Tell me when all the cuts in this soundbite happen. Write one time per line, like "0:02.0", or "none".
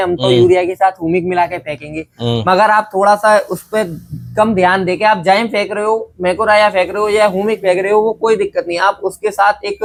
none